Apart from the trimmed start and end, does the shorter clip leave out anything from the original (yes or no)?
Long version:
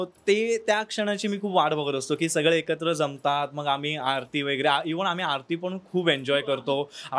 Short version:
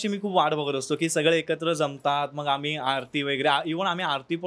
no